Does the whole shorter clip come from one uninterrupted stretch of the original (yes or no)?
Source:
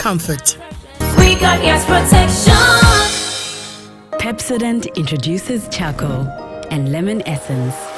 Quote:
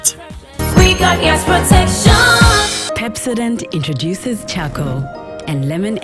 no